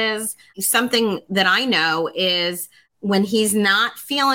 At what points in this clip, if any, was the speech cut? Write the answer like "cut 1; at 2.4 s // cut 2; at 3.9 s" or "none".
none

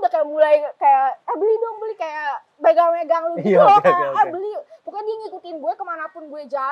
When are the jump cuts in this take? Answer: none

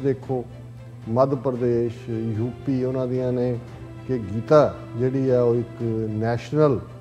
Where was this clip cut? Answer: none

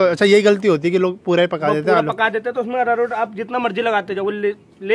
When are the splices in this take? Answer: none

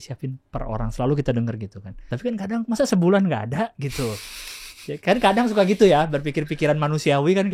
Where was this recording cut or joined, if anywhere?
cut 1; at 2.1 s

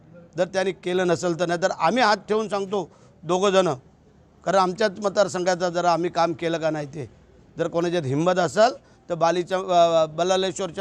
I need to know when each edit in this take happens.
cut 1; at 1.2 s

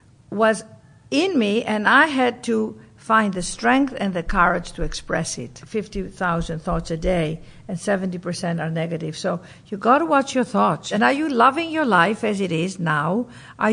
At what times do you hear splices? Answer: cut 1; at 5.6 s // cut 2; at 10.9 s

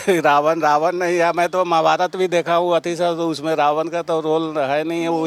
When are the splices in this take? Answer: none

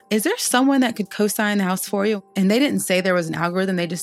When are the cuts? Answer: cut 1; at 2.2 s

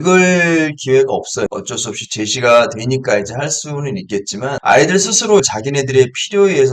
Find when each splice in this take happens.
cut 1; at 1.5 s

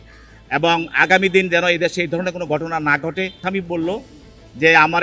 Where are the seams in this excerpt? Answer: cut 1; at 3.6 s

